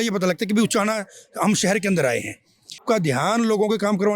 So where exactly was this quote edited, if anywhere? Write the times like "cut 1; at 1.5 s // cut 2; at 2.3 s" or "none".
cut 1; at 2.8 s